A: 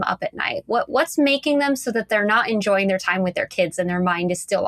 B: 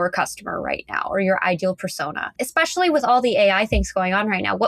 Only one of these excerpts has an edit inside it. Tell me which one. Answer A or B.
B